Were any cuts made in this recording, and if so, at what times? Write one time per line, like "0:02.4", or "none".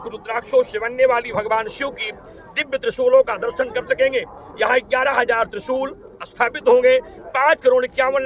none